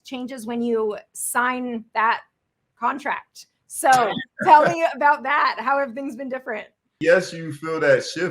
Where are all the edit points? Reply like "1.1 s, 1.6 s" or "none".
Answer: 6.9 s

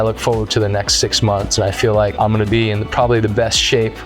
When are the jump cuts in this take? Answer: 2.1 s

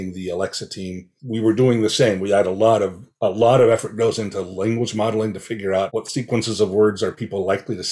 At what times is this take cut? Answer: 1.1 s

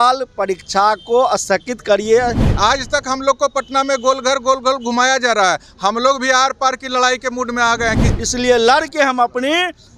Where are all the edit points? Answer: 2.5 s, 8.1 s

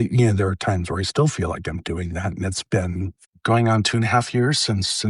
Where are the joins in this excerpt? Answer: 3.3 s

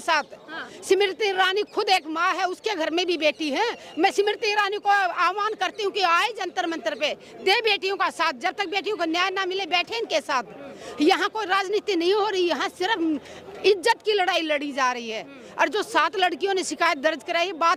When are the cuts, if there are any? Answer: none

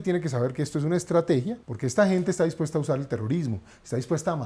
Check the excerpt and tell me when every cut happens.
1.6 s

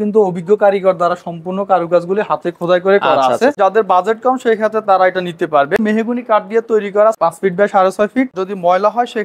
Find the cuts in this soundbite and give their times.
3.6 s, 5.8 s, 7.2 s, 8.3 s

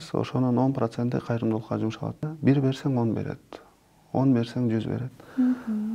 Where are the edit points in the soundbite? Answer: 2.2 s

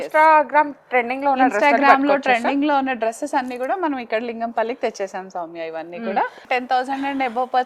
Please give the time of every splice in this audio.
6.4 s

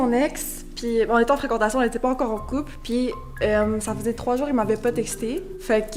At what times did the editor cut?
none

